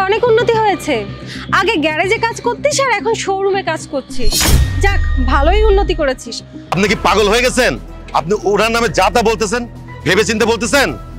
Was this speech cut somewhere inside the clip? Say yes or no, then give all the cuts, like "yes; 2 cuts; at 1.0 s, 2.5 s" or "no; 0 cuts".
yes; 1 cut; at 6.7 s